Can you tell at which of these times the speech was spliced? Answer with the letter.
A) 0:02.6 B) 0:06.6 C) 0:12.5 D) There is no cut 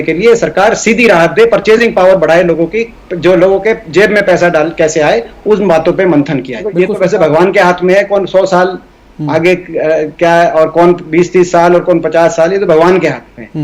B